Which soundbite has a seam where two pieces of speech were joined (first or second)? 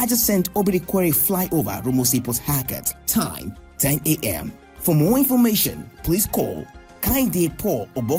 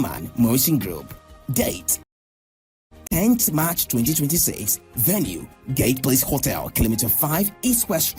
second